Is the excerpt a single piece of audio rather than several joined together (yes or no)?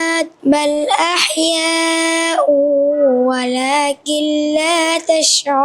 yes